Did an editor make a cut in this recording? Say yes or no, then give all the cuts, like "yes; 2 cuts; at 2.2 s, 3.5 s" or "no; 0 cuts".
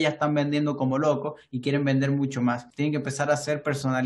yes; 1 cut; at 2.7 s